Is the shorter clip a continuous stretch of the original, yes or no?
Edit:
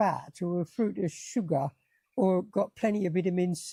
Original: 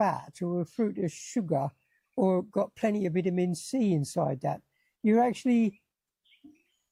yes